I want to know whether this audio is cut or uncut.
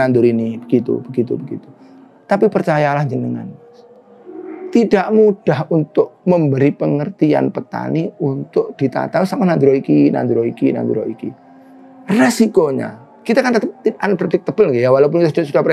uncut